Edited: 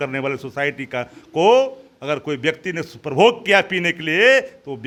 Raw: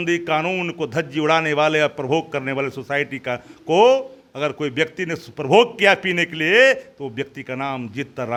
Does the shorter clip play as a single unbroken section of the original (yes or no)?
yes